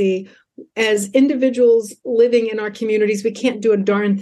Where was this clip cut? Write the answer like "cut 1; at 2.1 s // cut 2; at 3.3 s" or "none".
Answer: none